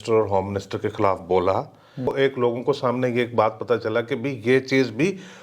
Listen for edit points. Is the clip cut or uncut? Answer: cut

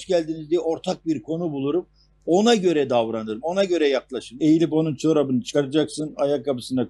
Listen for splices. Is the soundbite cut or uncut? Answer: cut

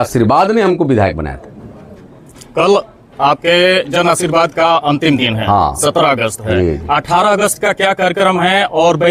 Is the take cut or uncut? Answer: uncut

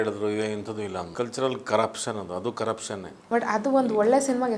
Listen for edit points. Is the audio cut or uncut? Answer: cut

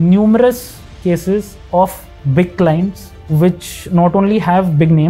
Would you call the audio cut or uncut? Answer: uncut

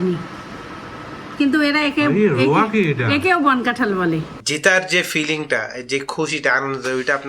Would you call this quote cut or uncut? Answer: cut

